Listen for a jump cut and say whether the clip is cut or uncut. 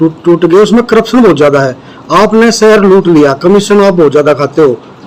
uncut